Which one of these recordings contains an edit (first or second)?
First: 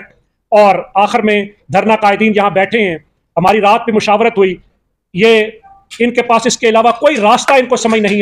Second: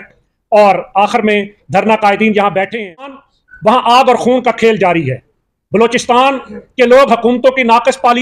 second